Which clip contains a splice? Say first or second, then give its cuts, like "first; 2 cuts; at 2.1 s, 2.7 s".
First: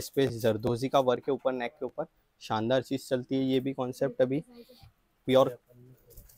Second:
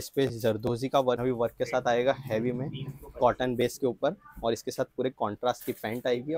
second; 1 cut; at 1.2 s